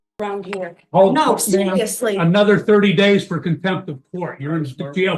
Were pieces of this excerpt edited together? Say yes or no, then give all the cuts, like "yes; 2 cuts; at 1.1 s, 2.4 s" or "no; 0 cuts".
no; 0 cuts